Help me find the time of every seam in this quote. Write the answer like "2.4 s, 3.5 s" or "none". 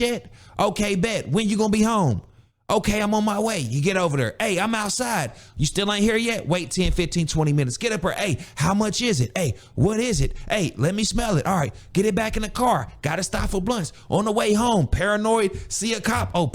none